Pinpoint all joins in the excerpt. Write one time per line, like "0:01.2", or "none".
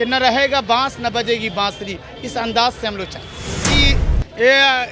0:03.7